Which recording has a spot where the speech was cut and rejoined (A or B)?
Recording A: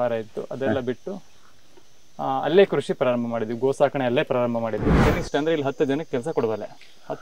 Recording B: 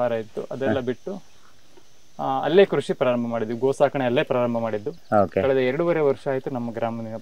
A